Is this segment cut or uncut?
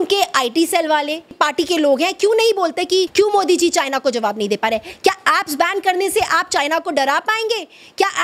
cut